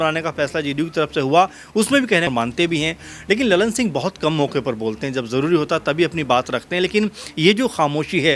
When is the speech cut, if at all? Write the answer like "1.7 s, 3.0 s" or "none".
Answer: 2.3 s